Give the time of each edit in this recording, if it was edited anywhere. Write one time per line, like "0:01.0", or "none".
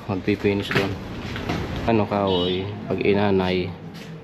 0:01.9